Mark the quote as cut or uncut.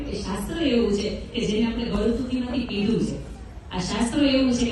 uncut